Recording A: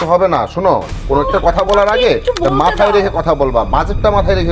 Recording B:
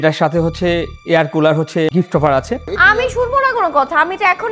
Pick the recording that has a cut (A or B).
B